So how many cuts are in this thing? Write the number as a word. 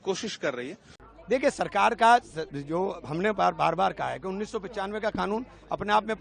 one